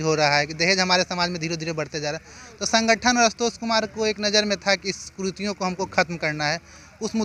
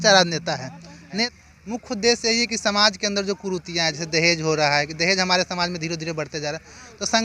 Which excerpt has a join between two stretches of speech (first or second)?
second